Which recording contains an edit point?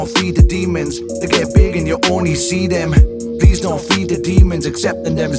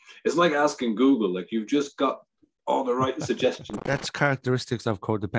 second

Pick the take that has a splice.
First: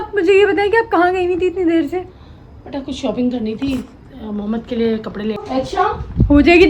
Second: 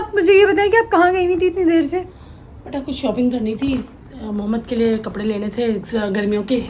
first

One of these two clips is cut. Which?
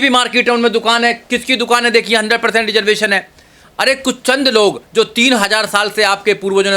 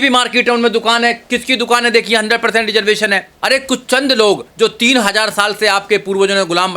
second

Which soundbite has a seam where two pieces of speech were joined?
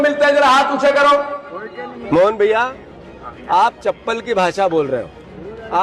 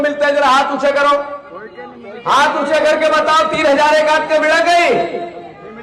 first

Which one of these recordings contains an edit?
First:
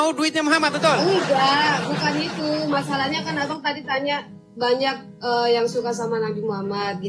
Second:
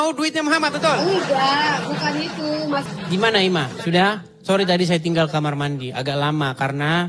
second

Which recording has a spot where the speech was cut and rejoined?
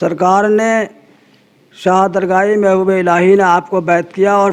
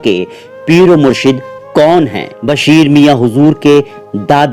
second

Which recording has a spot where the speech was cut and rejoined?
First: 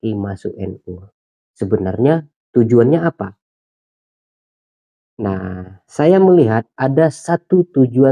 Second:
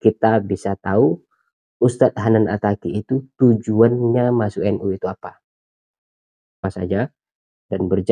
second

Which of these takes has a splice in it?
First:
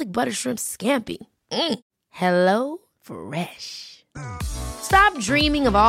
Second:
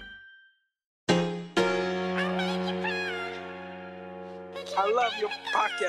second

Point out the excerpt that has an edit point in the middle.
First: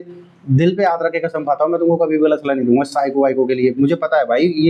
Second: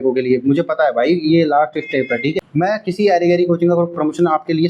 second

